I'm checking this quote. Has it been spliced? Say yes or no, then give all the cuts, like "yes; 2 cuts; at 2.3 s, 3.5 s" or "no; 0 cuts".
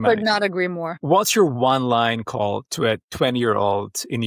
yes; 1 cut; at 1.0 s